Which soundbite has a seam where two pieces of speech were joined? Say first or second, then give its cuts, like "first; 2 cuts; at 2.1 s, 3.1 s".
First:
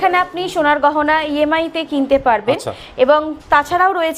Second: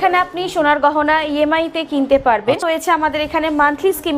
second; 1 cut; at 2.6 s